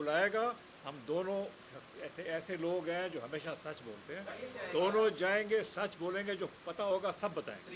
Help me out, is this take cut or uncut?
uncut